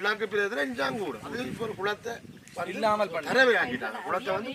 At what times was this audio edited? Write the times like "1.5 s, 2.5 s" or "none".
1.4 s